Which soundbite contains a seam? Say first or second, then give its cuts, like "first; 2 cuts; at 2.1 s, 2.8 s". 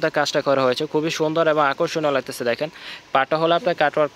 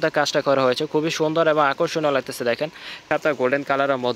second; 1 cut; at 3.1 s